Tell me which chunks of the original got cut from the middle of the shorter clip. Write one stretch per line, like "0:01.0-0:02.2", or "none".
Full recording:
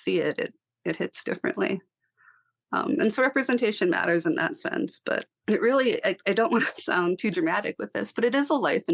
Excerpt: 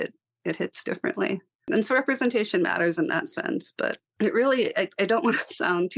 0:02.1-0:03.0